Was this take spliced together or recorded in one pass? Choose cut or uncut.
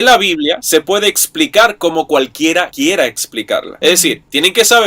cut